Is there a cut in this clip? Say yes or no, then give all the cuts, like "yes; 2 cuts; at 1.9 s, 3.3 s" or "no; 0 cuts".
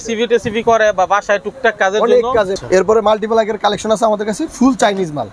yes; 1 cut; at 2.6 s